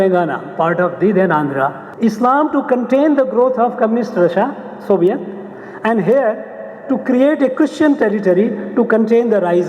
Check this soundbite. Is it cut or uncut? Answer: cut